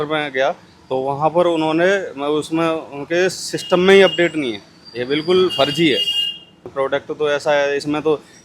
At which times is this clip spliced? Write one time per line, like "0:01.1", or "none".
0:06.7